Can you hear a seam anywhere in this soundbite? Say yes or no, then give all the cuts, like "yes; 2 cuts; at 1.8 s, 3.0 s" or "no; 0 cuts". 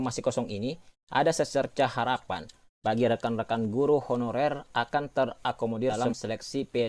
no; 0 cuts